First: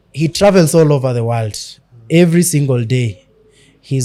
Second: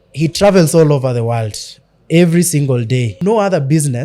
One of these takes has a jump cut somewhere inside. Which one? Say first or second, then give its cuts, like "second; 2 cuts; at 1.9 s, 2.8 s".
second; 1 cut; at 3.1 s